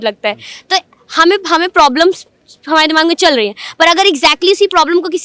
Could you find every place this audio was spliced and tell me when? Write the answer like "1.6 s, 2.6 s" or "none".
none